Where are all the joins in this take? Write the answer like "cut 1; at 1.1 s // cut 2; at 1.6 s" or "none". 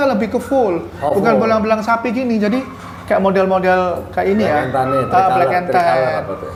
none